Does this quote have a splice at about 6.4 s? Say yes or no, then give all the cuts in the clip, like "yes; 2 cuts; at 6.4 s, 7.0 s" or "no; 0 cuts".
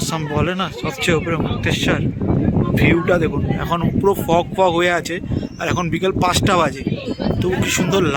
no; 0 cuts